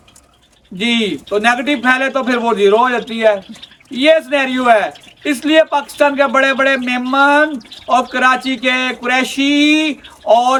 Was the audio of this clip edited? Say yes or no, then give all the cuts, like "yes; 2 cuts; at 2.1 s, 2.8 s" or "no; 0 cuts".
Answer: no; 0 cuts